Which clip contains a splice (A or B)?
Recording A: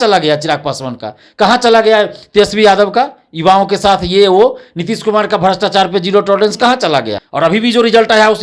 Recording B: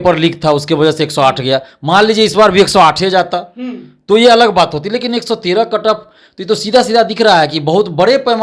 A